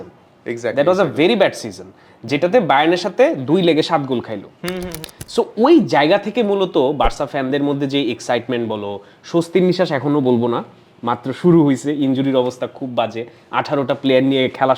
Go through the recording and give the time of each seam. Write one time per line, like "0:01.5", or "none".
0:04.9